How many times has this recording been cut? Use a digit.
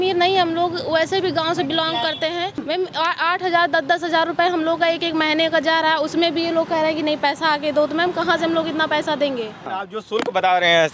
2